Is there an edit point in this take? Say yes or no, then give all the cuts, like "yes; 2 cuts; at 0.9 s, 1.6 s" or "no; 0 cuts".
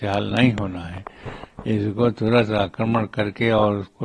no; 0 cuts